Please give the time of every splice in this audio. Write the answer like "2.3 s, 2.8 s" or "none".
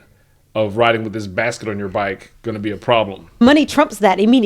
3.4 s